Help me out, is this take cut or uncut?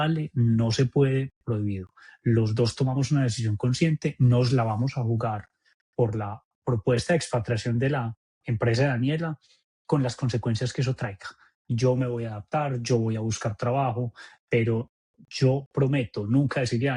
uncut